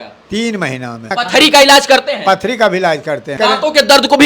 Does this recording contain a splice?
yes; 2 cuts; at 1.1 s, 3.3 s

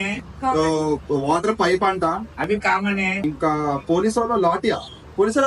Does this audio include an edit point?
no; 0 cuts

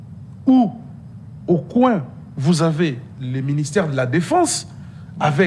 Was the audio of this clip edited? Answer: no; 0 cuts

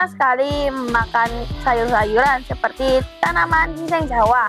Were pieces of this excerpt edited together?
no; 0 cuts

